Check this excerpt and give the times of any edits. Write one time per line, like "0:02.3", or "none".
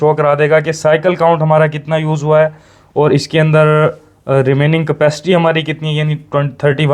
none